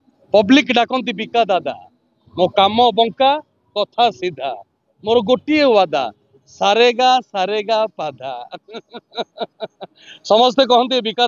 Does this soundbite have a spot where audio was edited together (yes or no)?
no